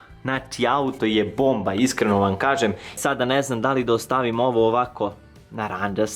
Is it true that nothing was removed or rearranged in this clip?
no; 1 cut; at 2.9 s

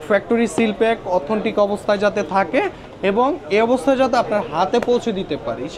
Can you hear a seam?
no; 0 cuts

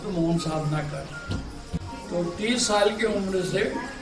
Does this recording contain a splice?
no; 0 cuts

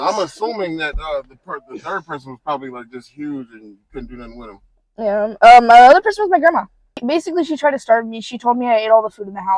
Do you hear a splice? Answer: yes; 1 cut; at 7.0 s

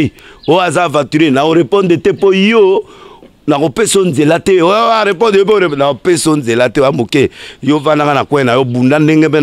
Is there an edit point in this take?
no; 0 cuts

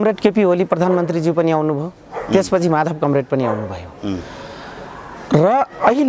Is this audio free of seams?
yes; 0 cuts

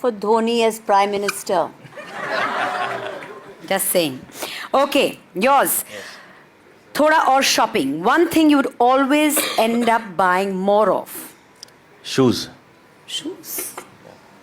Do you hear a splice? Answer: no; 0 cuts

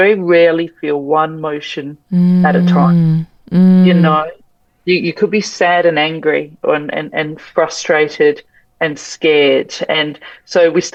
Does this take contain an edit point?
no; 0 cuts

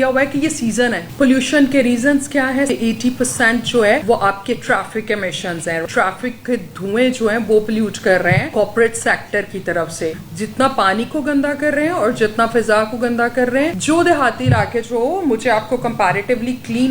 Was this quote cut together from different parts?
yes; 7 cuts; at 1.0 s, 2.7 s, 4.0 s, 5.8 s, 8.5 s, 10.2 s, 13.8 s

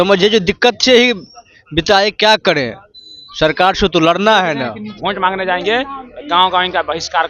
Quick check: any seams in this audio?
yes; 1 cut; at 4.9 s

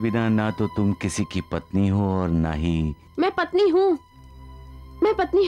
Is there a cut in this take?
no; 0 cuts

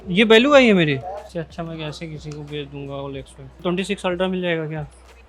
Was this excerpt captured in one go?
no; 2 cuts; at 1.3 s, 3.5 s

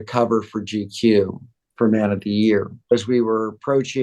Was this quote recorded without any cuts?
no; 1 cut; at 2.9 s

